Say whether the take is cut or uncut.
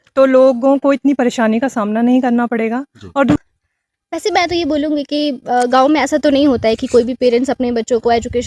cut